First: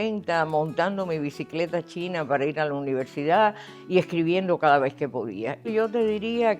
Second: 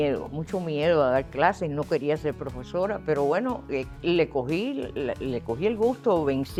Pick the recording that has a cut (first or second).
first